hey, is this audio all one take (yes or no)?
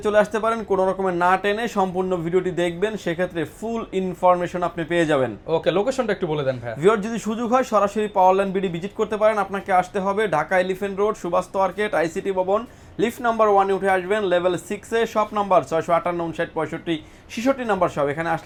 yes